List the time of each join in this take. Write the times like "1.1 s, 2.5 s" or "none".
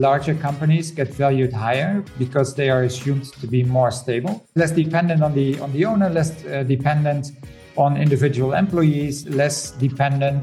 9.2 s